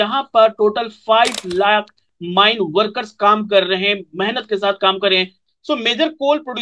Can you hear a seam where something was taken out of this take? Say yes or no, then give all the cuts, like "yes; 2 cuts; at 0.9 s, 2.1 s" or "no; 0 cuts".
yes; 1 cut; at 5.4 s